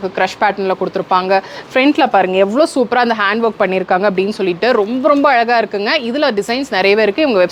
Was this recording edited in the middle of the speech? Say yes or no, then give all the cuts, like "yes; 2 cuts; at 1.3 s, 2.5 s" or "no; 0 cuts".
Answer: no; 0 cuts